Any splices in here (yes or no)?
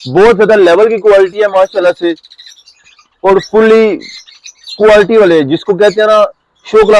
no